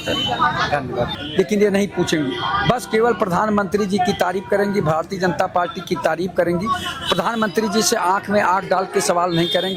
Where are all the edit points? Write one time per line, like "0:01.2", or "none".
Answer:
0:01.2